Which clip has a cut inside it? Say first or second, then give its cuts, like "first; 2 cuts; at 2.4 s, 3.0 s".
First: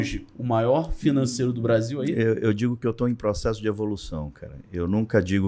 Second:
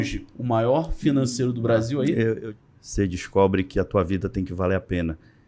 second; 1 cut; at 2.4 s